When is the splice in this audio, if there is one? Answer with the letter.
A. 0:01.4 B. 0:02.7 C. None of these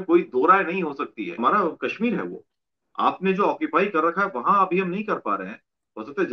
A